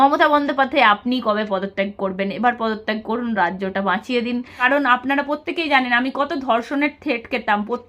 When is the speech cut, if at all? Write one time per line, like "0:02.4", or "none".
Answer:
0:04.6